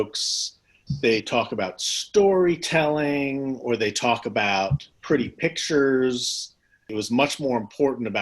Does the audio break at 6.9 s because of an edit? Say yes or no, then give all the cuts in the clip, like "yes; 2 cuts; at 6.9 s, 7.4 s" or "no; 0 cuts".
yes; 1 cut; at 6.9 s